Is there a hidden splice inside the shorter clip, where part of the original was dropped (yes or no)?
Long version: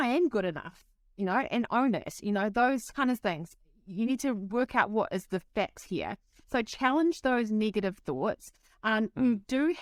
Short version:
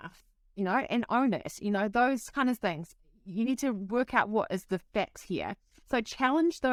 no